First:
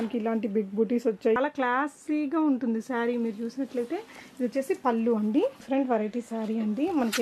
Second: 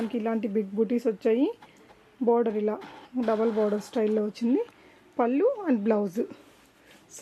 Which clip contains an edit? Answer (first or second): first